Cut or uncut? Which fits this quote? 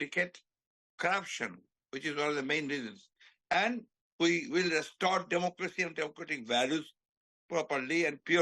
uncut